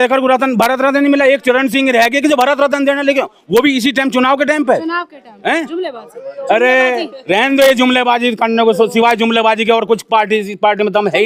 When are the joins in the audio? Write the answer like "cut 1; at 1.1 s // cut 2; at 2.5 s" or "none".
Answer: none